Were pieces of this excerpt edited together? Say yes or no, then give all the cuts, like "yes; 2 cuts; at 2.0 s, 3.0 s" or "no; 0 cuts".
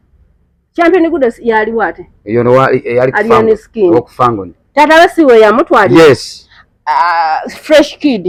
no; 0 cuts